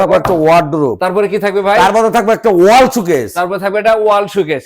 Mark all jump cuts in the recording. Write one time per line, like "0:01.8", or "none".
0:01.0